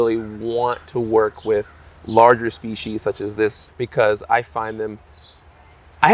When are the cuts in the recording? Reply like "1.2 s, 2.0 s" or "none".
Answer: 3.7 s